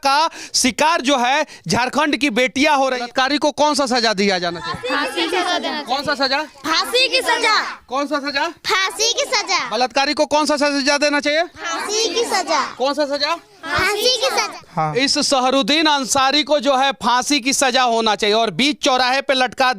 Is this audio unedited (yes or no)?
no